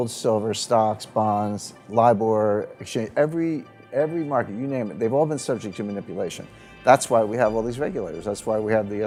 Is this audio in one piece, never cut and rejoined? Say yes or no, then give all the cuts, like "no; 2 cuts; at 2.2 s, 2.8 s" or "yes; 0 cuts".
yes; 0 cuts